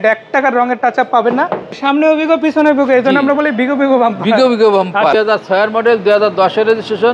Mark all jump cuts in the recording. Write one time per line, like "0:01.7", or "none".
0:01.8
0:05.1

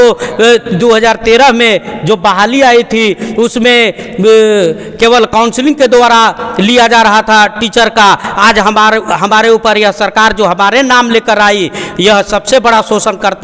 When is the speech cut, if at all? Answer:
none

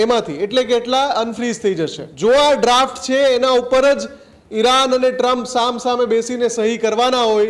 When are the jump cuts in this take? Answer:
0:02.0

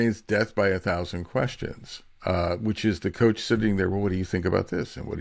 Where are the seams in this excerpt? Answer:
none

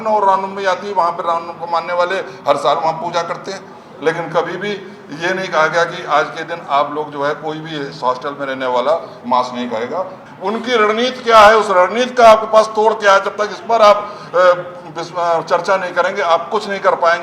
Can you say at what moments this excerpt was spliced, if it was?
0:10.2

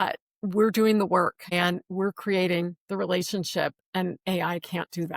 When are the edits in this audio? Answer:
0:01.4

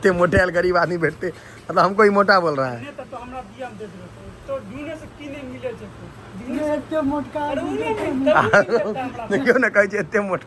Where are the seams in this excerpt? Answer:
none

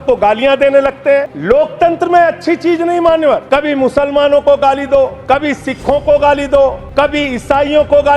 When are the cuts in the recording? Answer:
0:01.3
0:03.4
0:05.2
0:06.8

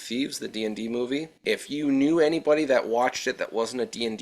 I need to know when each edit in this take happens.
0:01.4

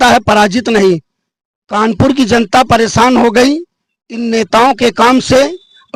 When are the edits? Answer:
none

